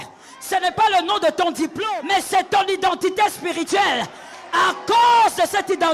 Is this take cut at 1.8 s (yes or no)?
yes